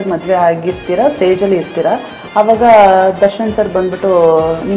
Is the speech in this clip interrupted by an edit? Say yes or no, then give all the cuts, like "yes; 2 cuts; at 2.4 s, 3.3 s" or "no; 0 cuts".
no; 0 cuts